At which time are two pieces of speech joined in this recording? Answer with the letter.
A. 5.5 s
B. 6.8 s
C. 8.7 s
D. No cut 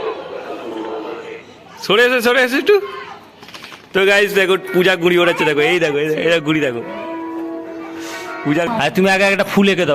C